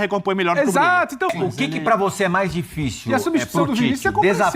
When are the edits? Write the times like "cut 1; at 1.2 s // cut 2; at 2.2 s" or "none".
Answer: cut 1; at 1.3 s

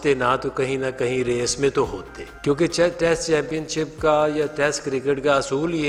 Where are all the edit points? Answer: none

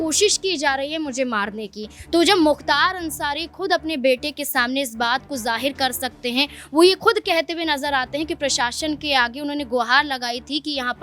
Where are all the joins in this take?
none

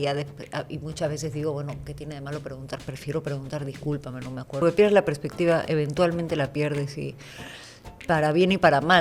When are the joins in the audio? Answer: cut 1; at 4.6 s

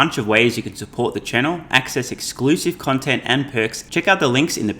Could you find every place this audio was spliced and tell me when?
cut 1; at 3.8 s

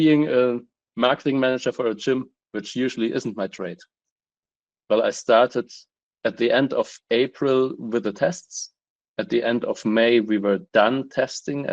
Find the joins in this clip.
cut 1; at 4.5 s

